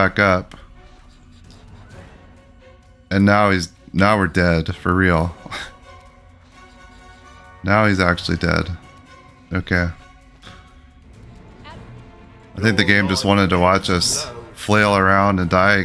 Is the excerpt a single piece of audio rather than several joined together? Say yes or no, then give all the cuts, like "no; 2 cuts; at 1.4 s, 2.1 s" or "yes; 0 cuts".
no; 1 cut; at 11.4 s